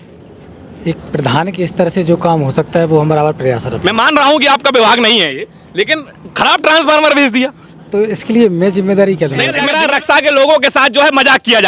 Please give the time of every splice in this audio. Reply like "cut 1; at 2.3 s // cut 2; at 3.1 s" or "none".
cut 1; at 9.6 s